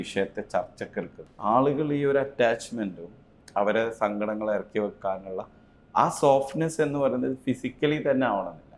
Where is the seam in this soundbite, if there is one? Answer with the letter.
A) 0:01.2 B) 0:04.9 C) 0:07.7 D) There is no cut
A